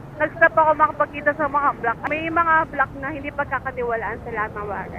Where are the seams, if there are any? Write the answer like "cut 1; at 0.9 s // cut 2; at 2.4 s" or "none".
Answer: cut 1; at 2.0 s